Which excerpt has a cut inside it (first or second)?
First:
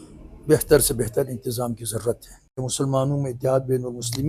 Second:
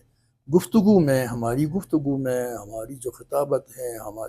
first